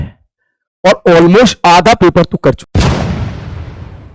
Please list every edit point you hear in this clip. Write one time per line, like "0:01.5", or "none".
0:02.7